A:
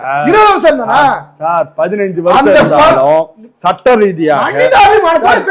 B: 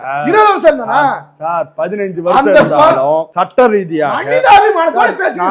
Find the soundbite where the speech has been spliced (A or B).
B